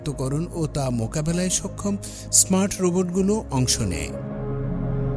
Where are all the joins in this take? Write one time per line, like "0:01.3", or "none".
none